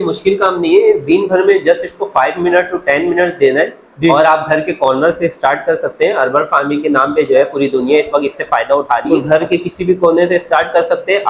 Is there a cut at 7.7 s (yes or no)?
no